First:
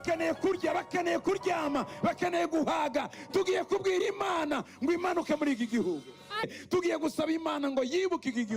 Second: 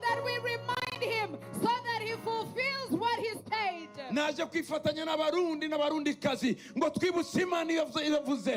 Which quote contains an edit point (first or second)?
first